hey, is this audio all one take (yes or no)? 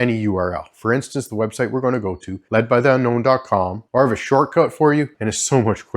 no